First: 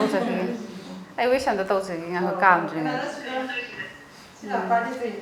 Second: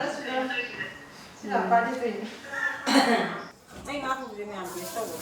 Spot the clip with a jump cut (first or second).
second